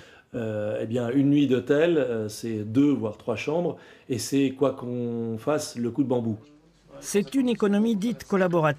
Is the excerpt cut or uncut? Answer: cut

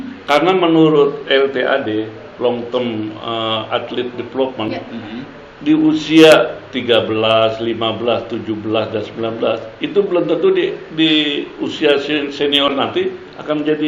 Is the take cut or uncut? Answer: uncut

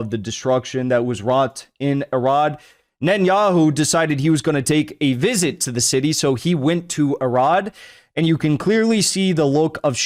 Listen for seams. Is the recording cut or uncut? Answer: uncut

